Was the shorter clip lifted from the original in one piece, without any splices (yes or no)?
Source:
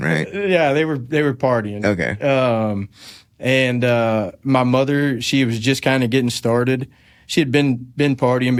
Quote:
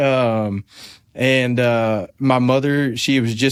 yes